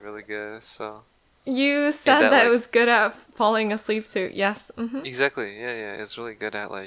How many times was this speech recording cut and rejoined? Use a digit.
1